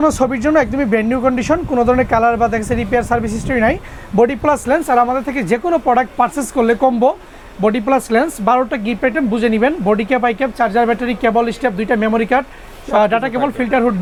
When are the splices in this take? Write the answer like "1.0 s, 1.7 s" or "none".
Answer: none